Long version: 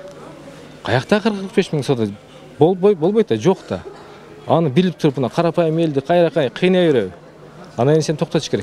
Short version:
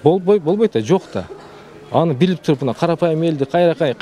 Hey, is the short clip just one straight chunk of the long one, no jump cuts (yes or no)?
yes